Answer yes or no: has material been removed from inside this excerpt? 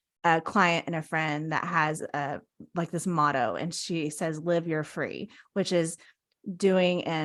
no